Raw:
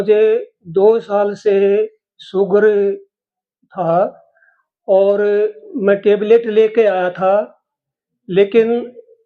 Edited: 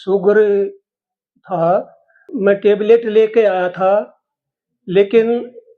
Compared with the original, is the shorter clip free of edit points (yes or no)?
no